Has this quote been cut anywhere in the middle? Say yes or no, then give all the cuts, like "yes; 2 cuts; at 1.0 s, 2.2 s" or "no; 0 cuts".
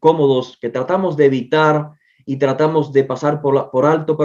no; 0 cuts